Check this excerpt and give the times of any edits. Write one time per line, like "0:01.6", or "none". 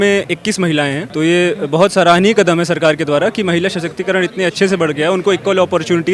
0:01.0